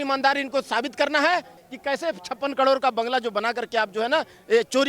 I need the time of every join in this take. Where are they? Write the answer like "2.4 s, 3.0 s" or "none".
1.6 s